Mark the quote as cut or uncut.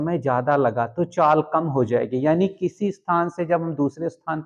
uncut